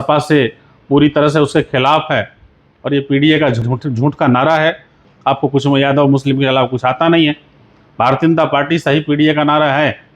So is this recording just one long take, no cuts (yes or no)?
no